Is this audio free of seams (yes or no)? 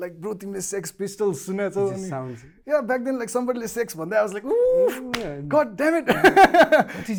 yes